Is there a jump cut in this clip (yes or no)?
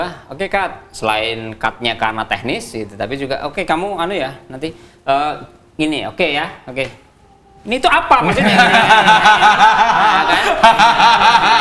no